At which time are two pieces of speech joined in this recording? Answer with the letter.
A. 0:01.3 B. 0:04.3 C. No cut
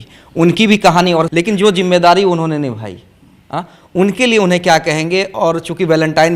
A